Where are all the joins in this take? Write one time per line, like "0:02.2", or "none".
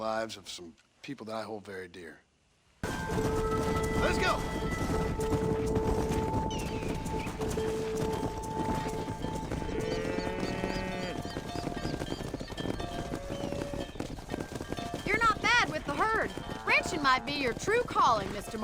0:02.9